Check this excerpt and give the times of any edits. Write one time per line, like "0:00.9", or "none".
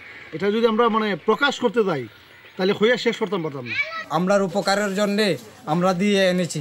0:04.0

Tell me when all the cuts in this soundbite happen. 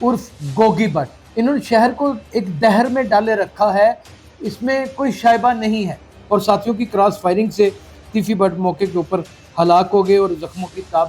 0:01.2
0:06.1

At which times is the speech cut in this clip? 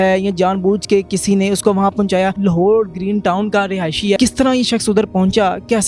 0:02.4
0:04.2

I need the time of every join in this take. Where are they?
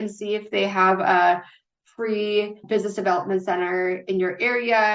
0:02.6

